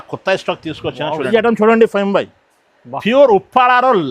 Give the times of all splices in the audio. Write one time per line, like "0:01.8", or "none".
0:01.3